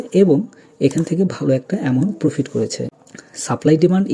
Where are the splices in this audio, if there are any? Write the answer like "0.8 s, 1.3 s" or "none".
2.9 s